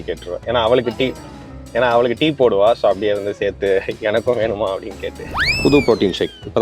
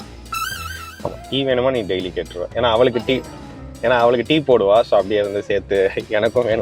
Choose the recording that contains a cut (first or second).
first